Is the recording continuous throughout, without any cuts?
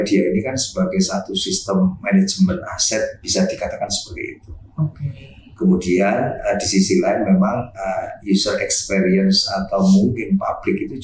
yes; 0 cuts

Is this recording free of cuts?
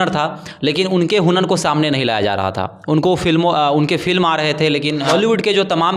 no; 1 cut; at 5.1 s

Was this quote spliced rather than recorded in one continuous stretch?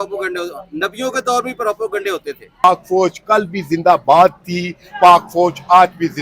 yes; 1 cut; at 2.6 s

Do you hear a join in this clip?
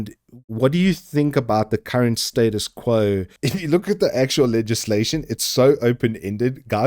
yes; 1 cut; at 3.4 s

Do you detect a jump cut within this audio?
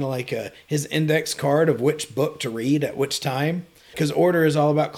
yes; 1 cut; at 3.9 s

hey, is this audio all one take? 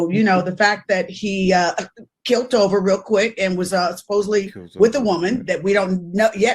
yes; 0 cuts

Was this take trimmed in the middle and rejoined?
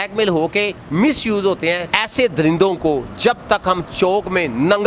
yes; 1 cut; at 2.0 s

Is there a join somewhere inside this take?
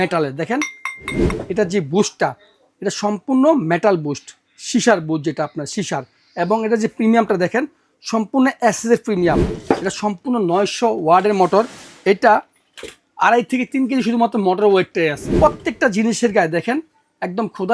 yes; 3 cuts; at 1.2 s, 9.5 s, 15.3 s

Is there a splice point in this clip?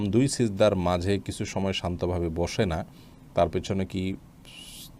no; 0 cuts

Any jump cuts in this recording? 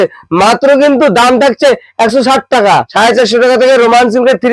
yes; 1 cut; at 2.9 s

